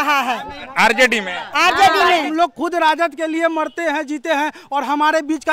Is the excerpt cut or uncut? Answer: cut